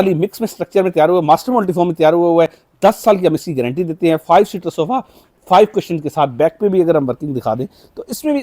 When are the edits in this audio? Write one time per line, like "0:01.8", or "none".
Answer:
none